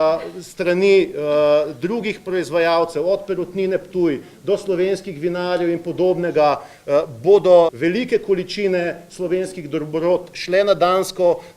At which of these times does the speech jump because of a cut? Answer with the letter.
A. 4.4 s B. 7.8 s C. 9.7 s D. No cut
B